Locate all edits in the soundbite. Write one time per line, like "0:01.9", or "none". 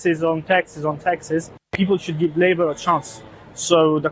0:02.0